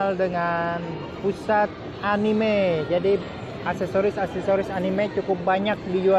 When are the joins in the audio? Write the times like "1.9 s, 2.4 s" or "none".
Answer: none